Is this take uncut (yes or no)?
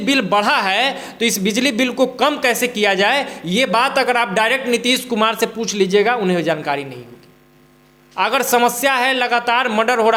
yes